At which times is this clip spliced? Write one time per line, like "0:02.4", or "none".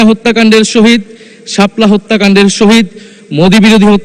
none